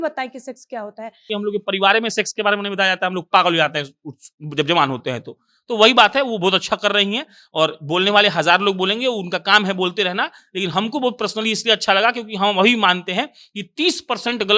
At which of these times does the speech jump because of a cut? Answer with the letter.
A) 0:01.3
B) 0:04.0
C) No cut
A